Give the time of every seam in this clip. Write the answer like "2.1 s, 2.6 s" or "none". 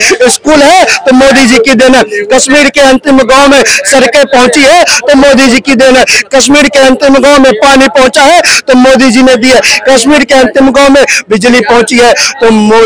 none